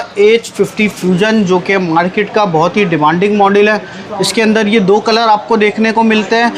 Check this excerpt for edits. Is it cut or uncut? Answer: uncut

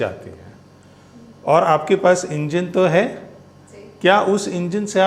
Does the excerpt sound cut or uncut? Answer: uncut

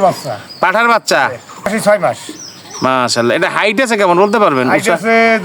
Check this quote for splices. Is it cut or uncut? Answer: cut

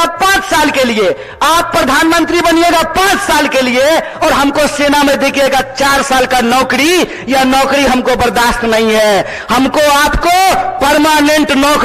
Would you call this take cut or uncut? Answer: uncut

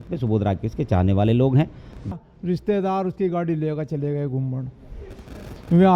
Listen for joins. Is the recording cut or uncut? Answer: cut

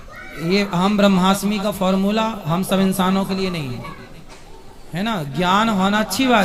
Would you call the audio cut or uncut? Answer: uncut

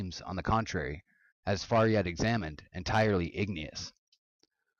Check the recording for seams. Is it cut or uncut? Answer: cut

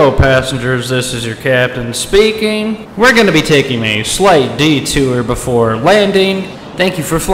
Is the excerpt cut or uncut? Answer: uncut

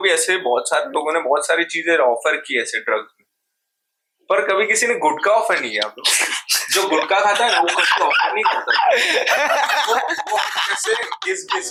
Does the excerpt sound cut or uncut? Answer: uncut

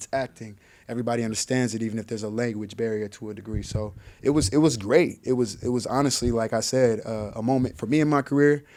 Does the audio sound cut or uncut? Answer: uncut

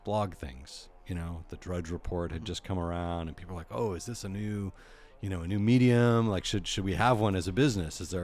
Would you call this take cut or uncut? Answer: uncut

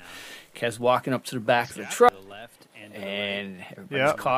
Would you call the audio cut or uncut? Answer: cut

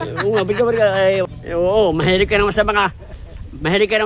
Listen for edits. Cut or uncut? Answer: cut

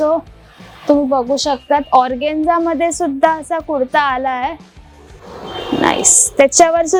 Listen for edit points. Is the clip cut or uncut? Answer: uncut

